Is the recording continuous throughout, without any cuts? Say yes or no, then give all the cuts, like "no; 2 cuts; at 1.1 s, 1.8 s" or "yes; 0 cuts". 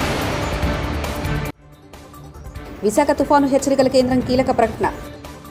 yes; 0 cuts